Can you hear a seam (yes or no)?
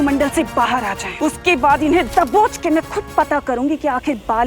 yes